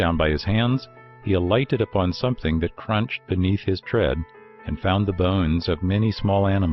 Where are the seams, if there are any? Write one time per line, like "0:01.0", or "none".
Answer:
0:01.4